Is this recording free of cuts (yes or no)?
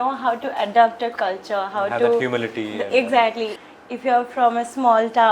no